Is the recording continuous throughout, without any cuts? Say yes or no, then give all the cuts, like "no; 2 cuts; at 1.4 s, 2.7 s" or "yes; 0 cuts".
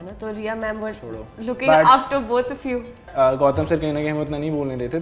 no; 1 cut; at 3.1 s